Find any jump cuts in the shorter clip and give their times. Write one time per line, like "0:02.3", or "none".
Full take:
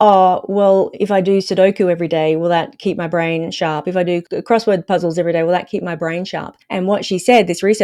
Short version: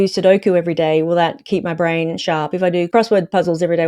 0:02.9